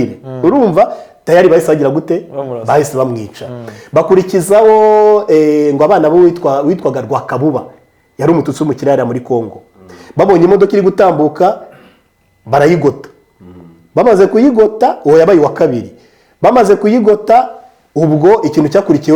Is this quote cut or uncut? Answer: uncut